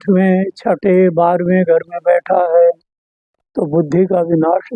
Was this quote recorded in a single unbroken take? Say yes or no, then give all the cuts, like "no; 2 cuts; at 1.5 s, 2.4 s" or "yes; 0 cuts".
yes; 0 cuts